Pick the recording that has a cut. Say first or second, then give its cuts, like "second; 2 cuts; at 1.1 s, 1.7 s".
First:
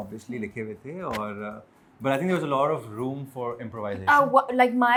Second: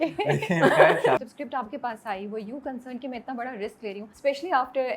second; 2 cuts; at 1.2 s, 4.1 s